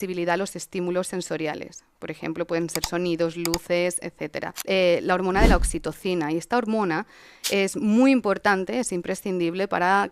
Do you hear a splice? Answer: yes; 1 cut; at 4.5 s

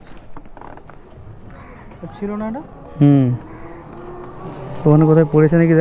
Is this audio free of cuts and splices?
yes; 0 cuts

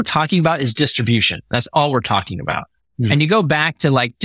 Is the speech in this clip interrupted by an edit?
no; 0 cuts

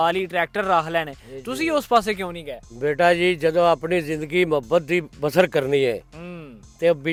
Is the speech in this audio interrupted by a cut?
no; 0 cuts

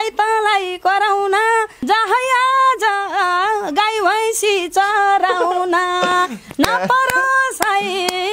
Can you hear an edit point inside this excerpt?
no; 0 cuts

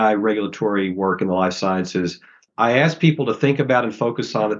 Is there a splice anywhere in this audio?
yes; 1 cut; at 2.5 s

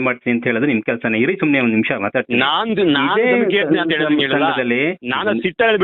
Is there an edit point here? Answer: no; 0 cuts

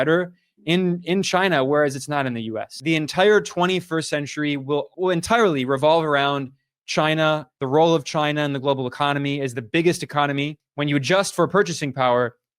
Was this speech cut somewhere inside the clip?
yes; 2 cuts; at 2.8 s, 10.6 s

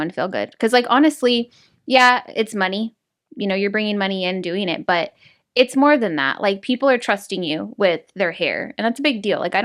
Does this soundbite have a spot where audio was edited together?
no; 0 cuts

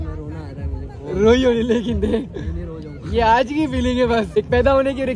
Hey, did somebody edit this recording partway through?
no; 0 cuts

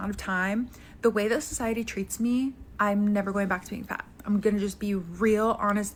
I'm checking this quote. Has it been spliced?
no; 0 cuts

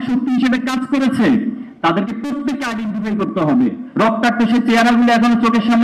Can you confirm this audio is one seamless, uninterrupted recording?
no; 1 cut; at 3.8 s

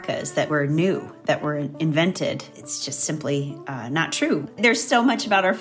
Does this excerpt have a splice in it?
yes; 2 cuts; at 2.5 s, 4.5 s

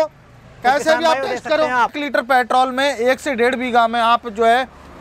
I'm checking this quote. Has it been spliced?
yes; 1 cut; at 2.0 s

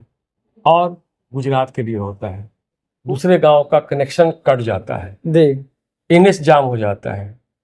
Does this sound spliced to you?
yes; 1 cut; at 2.9 s

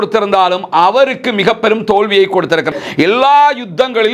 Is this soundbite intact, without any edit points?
no; 1 cut; at 2.7 s

